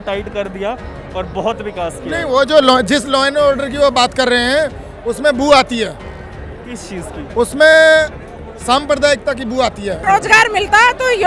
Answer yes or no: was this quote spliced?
yes